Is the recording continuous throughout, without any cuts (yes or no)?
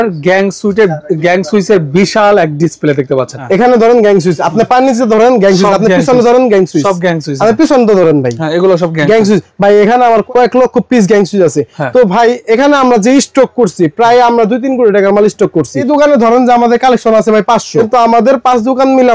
no